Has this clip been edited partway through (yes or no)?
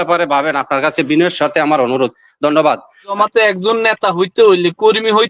yes